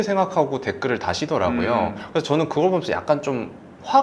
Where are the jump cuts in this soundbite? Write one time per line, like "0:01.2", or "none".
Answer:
none